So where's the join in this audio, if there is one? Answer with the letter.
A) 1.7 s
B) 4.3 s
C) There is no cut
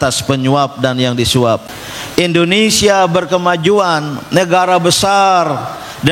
A